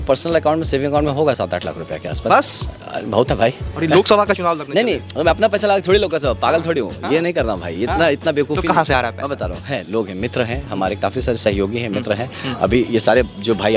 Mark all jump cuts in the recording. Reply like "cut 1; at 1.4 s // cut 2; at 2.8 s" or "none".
none